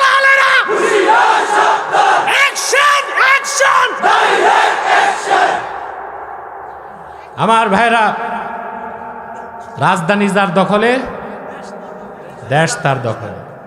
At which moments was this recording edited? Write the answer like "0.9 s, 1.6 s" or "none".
9.7 s